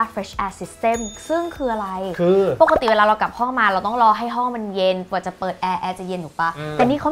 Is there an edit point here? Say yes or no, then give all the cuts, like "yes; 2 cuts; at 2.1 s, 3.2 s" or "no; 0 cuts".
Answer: no; 0 cuts